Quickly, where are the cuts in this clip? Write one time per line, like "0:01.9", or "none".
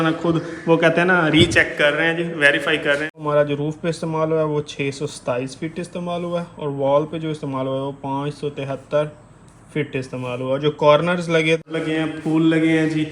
0:03.2
0:11.6